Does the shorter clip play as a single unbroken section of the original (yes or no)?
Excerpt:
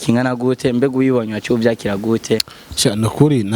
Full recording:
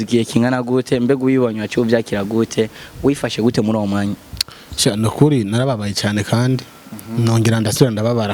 no